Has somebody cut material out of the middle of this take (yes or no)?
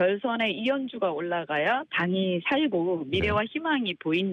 no